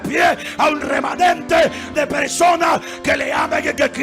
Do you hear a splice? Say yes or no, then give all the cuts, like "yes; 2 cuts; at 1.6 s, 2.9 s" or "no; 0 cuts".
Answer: yes; 1 cut; at 1.8 s